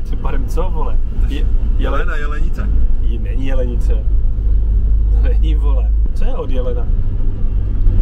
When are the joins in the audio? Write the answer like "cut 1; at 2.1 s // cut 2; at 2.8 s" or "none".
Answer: cut 1; at 6.0 s